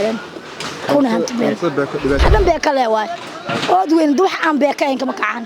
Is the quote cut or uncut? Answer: cut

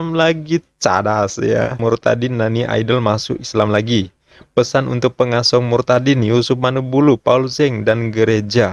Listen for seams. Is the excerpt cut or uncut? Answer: cut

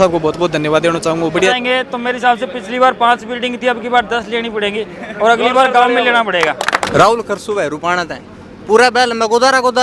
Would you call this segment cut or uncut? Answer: cut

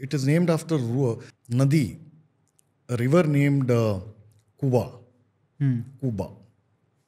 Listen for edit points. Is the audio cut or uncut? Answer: cut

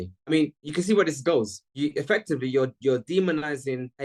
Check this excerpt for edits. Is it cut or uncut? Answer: uncut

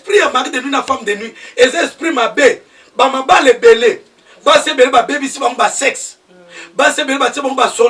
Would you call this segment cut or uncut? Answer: uncut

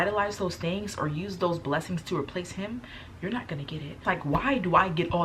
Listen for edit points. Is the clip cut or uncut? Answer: cut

